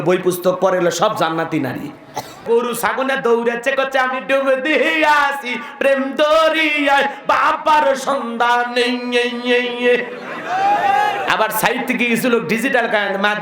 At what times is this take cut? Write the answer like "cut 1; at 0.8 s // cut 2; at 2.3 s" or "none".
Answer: cut 1; at 2.4 s